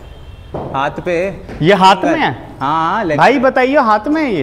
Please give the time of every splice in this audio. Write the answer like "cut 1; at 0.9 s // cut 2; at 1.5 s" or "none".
none